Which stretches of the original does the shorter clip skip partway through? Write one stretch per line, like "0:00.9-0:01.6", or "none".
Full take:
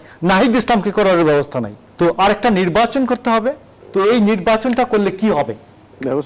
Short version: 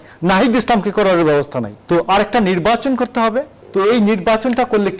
0:01.7-0:01.8
0:03.7-0:03.8